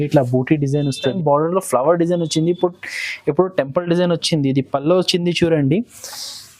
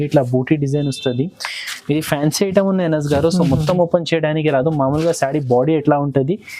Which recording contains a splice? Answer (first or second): first